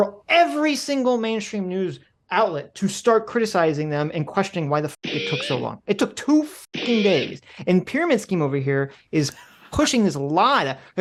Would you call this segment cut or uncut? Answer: uncut